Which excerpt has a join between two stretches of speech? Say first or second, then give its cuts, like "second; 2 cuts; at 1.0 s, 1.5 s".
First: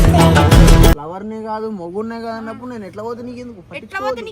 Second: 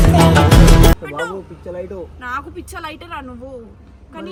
first; 1 cut; at 1.0 s